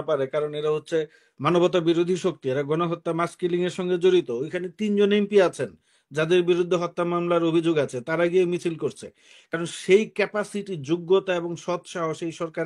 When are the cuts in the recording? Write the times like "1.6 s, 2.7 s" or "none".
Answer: none